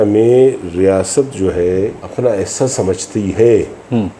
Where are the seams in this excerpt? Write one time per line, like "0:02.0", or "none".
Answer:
0:02.0